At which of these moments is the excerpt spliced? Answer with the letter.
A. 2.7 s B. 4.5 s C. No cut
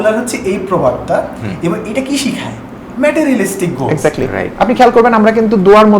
B